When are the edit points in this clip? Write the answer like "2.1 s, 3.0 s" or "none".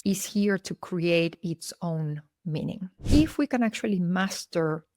3.1 s